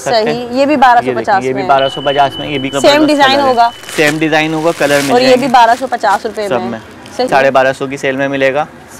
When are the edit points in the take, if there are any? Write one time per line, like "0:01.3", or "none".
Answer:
0:02.7
0:07.3